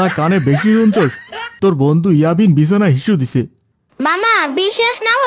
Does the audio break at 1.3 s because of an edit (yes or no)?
no